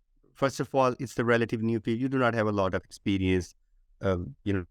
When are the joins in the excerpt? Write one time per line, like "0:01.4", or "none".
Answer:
none